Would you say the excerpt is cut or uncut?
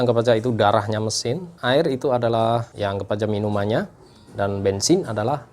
cut